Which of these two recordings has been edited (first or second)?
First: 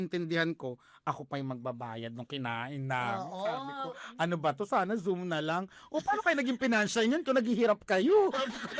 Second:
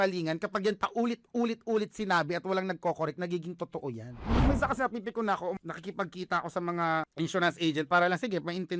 second